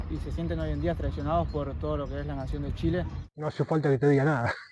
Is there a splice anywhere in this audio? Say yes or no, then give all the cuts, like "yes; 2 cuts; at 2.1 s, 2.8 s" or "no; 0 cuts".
no; 0 cuts